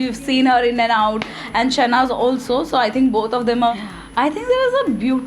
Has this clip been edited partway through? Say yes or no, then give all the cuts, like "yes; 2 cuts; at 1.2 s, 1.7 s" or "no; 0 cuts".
yes; 1 cut; at 3.7 s